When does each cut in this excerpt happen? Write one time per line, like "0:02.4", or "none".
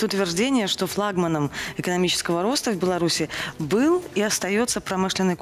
none